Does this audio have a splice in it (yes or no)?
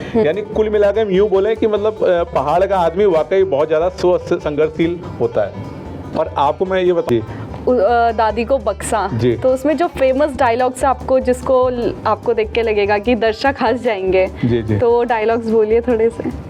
yes